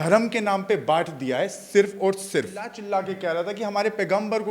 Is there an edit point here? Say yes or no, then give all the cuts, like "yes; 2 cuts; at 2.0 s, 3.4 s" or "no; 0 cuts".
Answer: yes; 1 cut; at 2.7 s